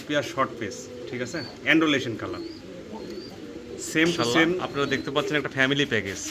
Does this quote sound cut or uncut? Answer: cut